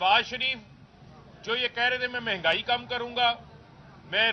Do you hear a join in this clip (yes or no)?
no